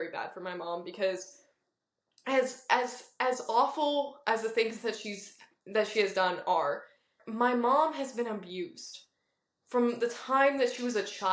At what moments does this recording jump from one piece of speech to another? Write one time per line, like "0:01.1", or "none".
0:07.2